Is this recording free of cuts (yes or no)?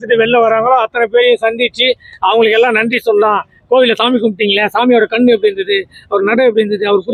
yes